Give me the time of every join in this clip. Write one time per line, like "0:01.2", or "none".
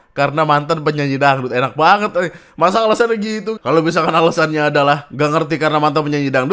0:03.5
0:05.1